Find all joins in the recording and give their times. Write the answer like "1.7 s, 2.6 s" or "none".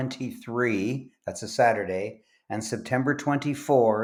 none